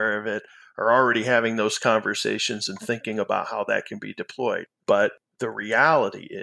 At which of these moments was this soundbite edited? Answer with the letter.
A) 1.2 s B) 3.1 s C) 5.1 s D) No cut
C